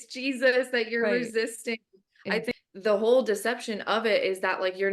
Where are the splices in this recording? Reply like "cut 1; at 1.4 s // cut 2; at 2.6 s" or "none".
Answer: cut 1; at 2.5 s